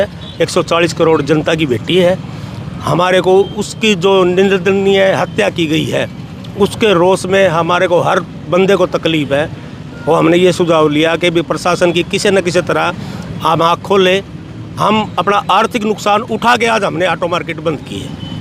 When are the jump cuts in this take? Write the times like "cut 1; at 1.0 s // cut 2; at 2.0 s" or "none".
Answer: none